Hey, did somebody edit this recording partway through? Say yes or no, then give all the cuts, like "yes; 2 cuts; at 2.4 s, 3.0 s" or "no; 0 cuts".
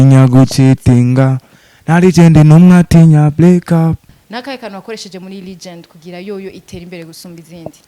yes; 1 cut; at 4.2 s